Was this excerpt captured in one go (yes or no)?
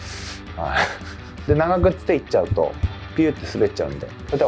no